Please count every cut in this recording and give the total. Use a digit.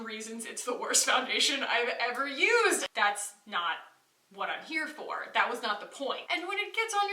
2